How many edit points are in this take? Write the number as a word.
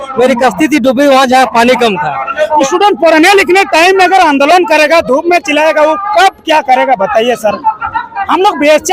one